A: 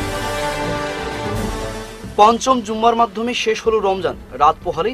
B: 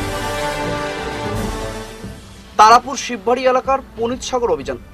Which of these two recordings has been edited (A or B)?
B